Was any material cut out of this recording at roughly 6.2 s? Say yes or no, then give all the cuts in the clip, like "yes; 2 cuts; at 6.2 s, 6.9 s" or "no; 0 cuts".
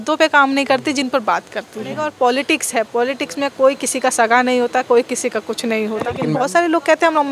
yes; 2 cuts; at 2.1 s, 6.2 s